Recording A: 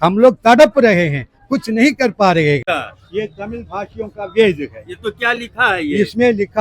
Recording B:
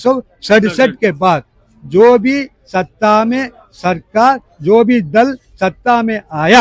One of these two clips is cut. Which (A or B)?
A